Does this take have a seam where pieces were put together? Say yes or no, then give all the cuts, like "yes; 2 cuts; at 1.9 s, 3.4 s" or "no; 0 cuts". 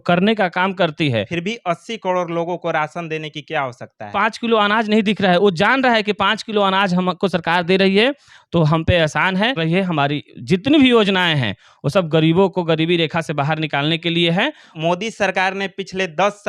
yes; 4 cuts; at 1.3 s, 4.0 s, 9.6 s, 14.6 s